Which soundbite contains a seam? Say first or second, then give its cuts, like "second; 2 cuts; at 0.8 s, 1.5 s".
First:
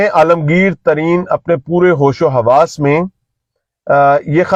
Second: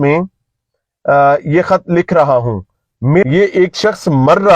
second; 1 cut; at 3.2 s